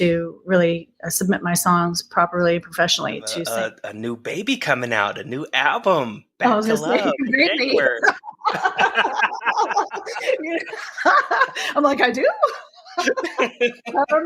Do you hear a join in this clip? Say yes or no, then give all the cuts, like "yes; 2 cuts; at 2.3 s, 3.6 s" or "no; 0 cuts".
yes; 1 cut; at 3.3 s